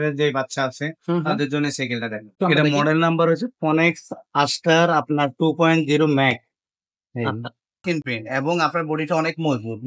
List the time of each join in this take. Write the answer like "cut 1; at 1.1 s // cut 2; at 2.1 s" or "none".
cut 1; at 2.3 s // cut 2; at 7.8 s